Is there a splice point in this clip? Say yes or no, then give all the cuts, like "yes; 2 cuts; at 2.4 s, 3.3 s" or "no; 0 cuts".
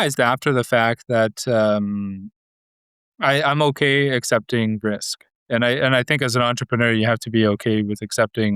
no; 0 cuts